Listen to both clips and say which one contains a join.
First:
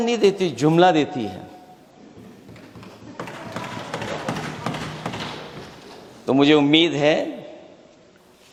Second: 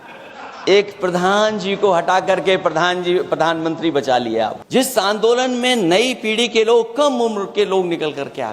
second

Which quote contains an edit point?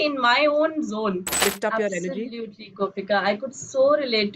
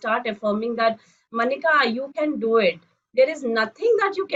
first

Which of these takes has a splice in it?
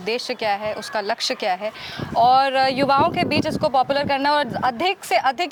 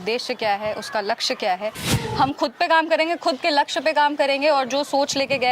second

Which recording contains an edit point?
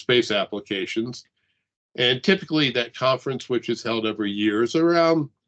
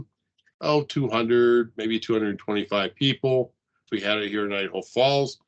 second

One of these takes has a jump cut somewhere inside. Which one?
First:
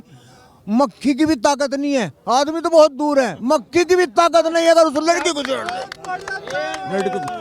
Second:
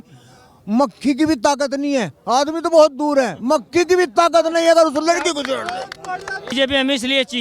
second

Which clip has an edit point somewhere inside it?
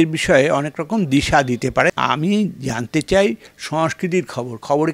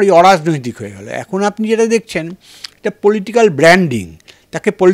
first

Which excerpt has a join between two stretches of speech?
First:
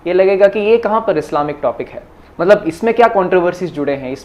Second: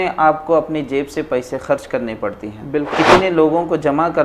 second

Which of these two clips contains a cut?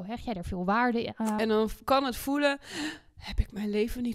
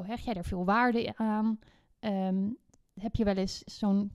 first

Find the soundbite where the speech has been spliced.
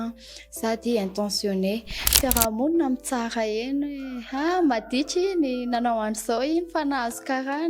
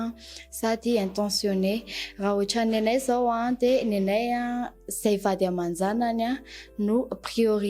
first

